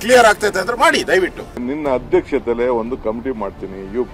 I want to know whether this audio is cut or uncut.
cut